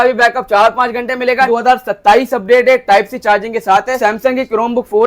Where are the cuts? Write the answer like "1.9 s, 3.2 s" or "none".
1.5 s, 4.0 s